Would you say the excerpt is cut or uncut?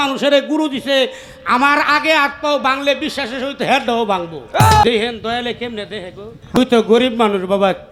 cut